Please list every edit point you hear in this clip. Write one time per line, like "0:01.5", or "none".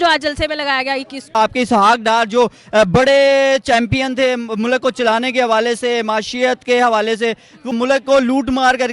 0:01.4
0:07.7